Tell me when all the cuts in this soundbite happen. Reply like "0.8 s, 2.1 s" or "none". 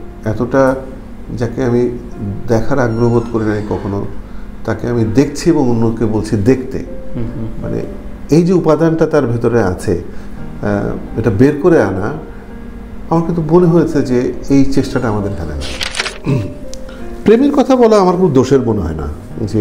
16.1 s